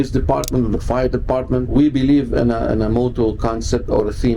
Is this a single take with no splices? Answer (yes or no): no